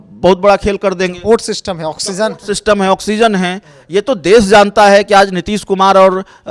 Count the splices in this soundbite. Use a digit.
0